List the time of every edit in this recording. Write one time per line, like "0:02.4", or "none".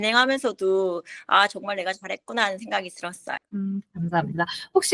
none